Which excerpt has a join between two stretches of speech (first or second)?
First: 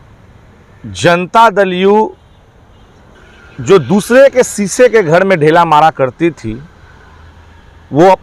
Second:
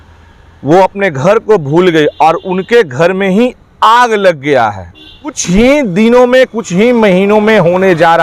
second